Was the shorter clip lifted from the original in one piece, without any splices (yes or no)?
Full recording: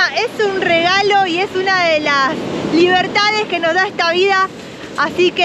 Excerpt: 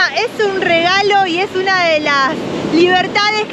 yes